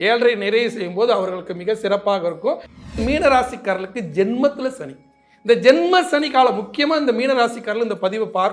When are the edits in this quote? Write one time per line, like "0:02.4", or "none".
0:03.0